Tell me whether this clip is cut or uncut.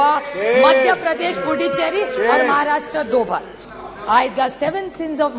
cut